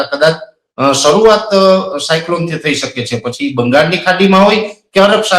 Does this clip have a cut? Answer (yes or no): no